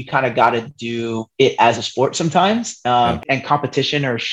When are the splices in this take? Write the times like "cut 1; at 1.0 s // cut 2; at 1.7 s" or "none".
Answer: cut 1; at 3.2 s